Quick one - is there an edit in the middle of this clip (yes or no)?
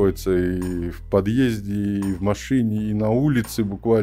no